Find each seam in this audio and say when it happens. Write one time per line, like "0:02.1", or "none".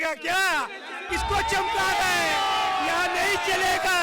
0:01.0